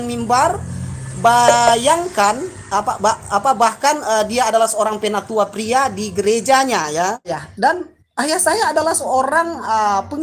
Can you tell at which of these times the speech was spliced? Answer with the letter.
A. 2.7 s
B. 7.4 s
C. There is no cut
B